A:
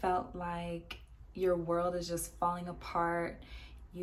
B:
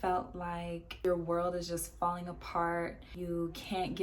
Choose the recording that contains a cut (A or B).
B